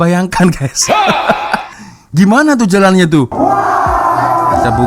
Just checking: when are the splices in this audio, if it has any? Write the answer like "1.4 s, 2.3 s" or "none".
3.3 s